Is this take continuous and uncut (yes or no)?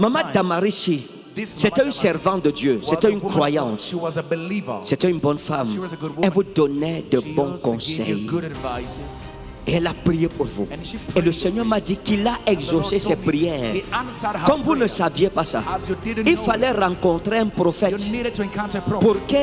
no